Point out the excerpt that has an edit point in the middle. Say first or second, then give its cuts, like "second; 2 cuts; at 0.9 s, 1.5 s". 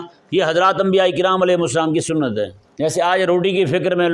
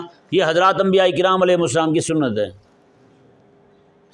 first; 1 cut; at 2.6 s